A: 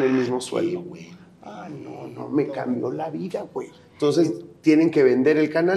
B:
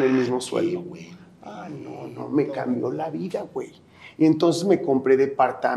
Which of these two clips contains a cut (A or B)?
A